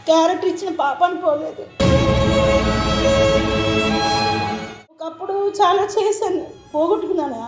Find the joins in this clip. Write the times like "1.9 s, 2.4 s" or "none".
none